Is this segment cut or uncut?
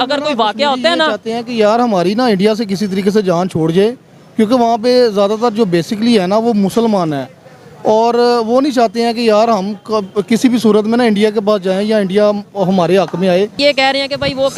cut